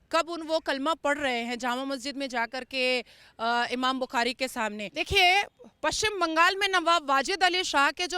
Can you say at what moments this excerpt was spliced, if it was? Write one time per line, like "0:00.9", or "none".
0:04.9